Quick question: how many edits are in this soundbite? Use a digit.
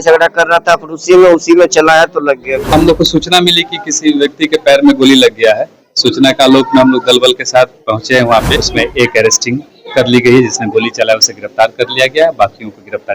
2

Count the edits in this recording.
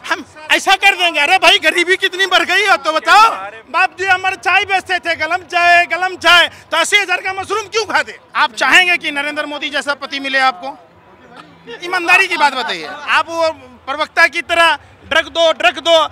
3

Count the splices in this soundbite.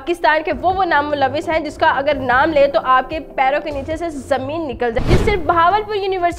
1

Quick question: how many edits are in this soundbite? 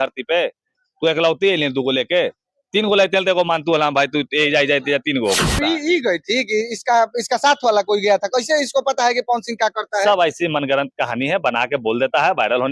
1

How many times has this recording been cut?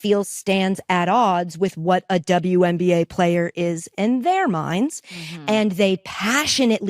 1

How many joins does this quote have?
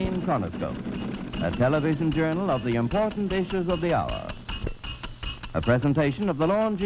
1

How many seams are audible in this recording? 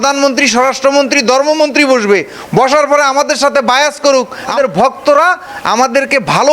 1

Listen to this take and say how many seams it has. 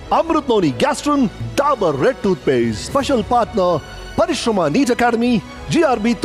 0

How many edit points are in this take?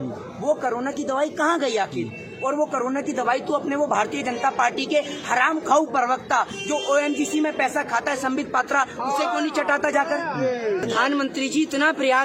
0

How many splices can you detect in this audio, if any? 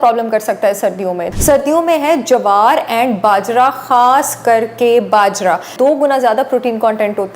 2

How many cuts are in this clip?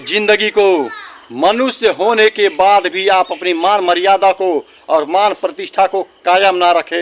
0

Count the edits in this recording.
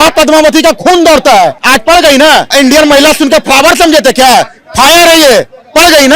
2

